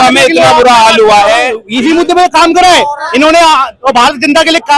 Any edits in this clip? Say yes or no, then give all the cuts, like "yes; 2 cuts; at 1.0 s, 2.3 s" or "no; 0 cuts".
yes; 1 cut; at 1.6 s